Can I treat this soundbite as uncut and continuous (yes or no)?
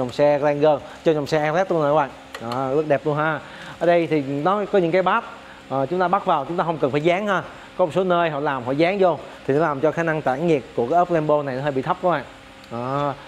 yes